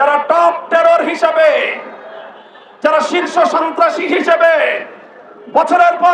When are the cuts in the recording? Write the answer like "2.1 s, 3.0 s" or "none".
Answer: none